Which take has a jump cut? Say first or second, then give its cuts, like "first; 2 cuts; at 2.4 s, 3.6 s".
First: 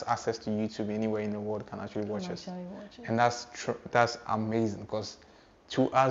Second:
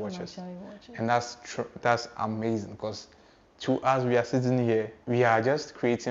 second; 1 cut; at 5.0 s